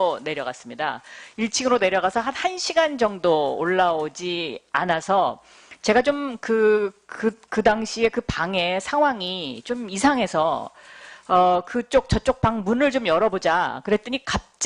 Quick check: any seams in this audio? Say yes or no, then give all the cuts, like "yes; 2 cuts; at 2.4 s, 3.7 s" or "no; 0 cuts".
yes; 1 cut; at 10.7 s